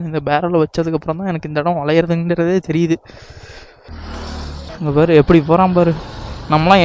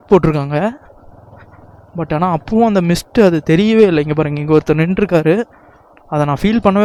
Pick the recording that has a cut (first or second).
first